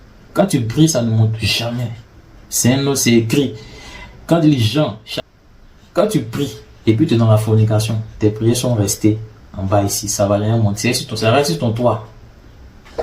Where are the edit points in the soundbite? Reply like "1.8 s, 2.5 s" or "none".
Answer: 5.0 s